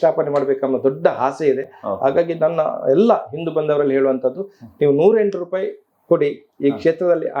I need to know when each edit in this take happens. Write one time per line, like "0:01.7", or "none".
none